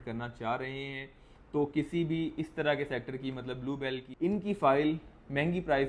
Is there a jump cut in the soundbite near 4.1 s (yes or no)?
yes